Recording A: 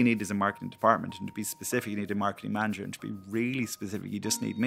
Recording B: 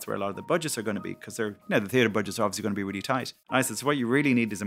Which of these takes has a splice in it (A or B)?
B